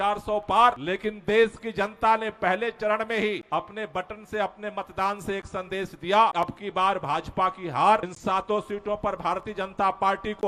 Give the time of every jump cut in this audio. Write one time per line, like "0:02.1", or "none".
0:00.8
0:03.4
0:06.3
0:08.1